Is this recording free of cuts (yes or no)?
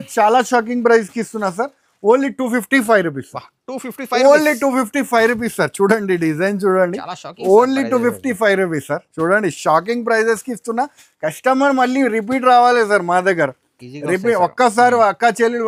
yes